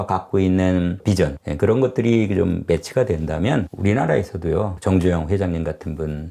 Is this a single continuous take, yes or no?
yes